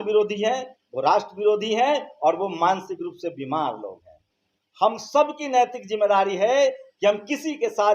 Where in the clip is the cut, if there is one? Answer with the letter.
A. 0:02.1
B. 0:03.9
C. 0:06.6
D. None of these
D